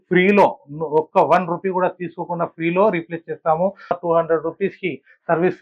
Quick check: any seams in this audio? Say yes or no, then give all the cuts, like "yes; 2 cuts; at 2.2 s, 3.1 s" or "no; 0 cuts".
yes; 1 cut; at 4.0 s